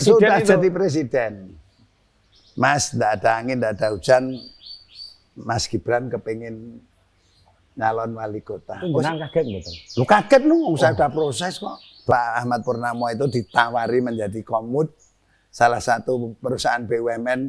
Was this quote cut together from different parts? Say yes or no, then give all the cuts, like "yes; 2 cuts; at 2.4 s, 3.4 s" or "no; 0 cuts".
yes; 2 cuts; at 8.8 s, 12.1 s